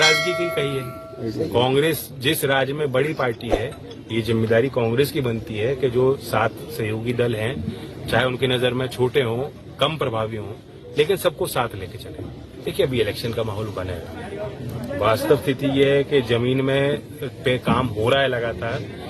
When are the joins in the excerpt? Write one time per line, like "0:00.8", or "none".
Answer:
0:12.8

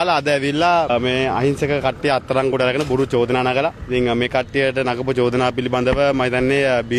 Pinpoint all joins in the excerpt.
none

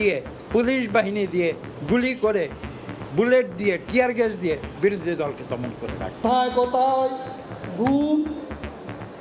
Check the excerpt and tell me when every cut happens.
0:06.1

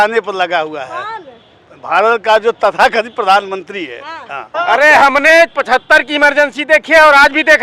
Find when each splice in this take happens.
0:04.5

